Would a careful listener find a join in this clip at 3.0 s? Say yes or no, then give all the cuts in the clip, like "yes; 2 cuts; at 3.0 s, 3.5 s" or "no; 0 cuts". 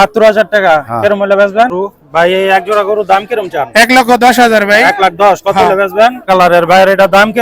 no; 2 cuts; at 1.7 s, 6.3 s